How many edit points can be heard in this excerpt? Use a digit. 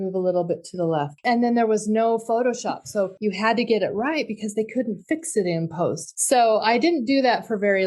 3